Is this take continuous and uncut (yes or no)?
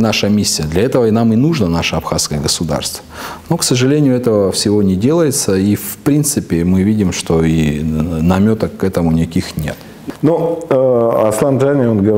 yes